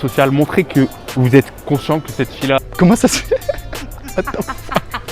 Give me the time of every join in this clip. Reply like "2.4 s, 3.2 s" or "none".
2.6 s